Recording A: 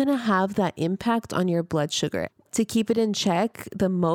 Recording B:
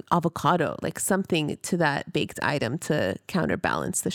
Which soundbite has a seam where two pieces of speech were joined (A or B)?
A